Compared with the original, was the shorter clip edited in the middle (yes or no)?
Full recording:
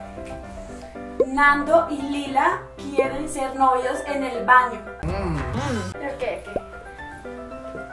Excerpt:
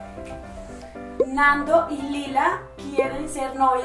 no